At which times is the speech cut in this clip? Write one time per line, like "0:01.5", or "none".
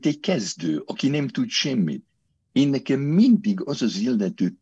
none